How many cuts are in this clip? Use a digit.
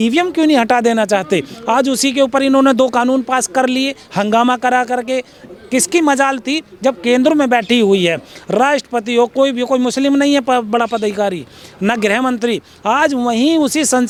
0